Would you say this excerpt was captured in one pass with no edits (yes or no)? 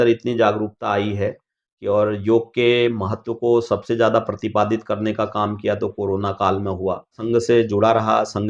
no